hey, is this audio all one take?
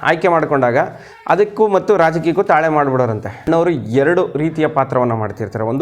no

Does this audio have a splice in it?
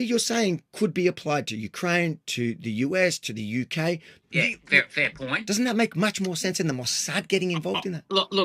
yes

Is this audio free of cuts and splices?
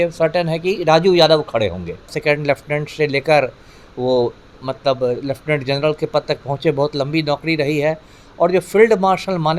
no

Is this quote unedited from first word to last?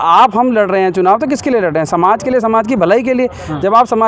yes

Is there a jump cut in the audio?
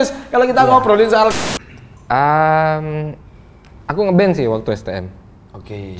yes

